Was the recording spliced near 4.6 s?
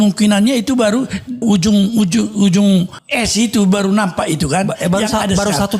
no; 2 cuts; at 1.4 s, 3.0 s

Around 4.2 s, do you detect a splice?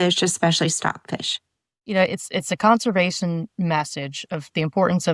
no; 1 cut; at 2.0 s

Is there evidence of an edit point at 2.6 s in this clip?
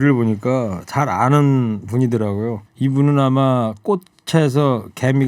yes; 1 cut; at 2.6 s

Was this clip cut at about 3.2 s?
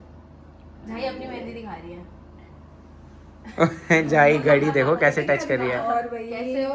no; 0 cuts

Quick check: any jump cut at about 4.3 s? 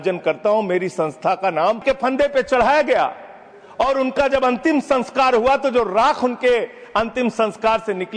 no; 1 cut; at 1.8 s

